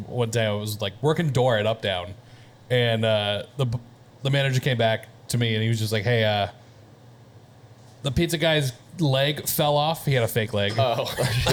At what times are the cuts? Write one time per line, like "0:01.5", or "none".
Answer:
none